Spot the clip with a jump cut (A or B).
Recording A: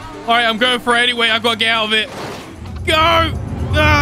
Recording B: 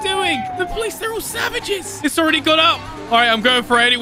B